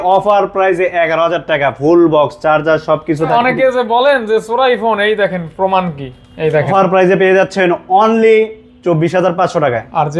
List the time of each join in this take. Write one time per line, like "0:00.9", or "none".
0:03.3
0:06.7

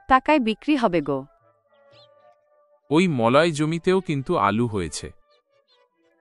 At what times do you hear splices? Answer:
0:01.3
0:02.8

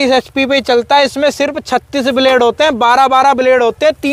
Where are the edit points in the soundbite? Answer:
none

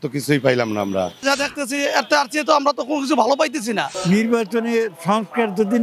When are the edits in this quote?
0:01.2
0:03.9

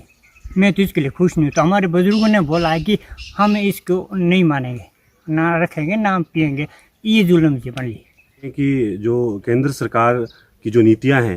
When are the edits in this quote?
0:08.5

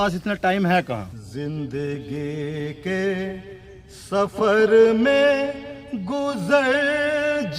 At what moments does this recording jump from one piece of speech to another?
0:01.2

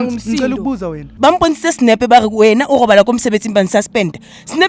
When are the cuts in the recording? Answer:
0:01.1

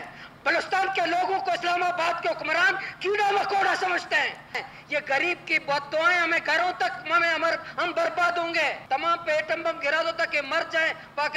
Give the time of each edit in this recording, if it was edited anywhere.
0:04.6
0:08.8

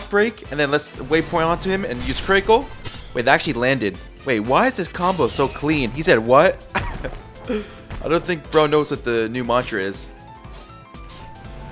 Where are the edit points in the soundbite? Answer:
none

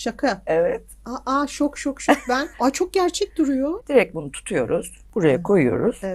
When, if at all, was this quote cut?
0:02.5
0:03.8
0:05.0

